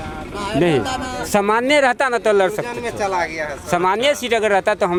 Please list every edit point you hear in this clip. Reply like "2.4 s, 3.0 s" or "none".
none